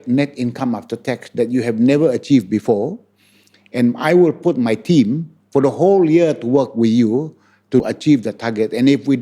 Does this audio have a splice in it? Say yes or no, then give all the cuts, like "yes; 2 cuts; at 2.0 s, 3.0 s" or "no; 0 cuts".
yes; 1 cut; at 7.8 s